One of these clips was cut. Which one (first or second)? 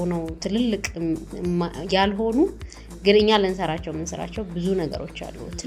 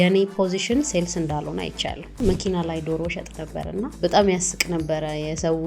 second